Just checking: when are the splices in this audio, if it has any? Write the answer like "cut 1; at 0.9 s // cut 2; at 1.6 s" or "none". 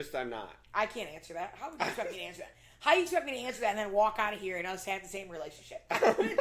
none